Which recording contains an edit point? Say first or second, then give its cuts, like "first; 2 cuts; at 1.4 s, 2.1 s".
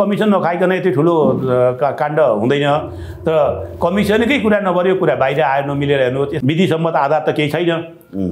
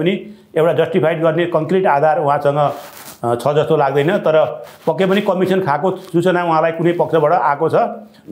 first; 1 cut; at 6.3 s